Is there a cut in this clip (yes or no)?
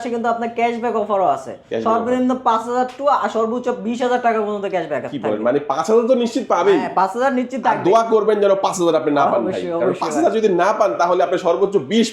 no